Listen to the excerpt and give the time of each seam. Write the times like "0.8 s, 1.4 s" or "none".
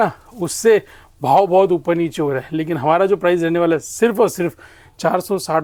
none